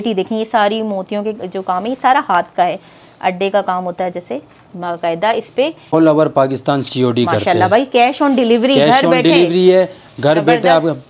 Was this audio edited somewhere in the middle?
yes; 1 cut; at 5.9 s

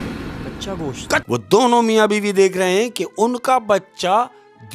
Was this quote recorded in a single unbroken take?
no; 1 cut; at 1.2 s

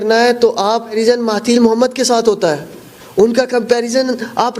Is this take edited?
yes; 1 cut; at 1.0 s

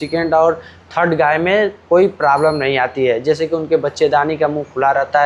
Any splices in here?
no; 0 cuts

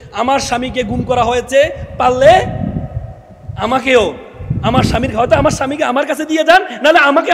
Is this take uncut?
yes; 0 cuts

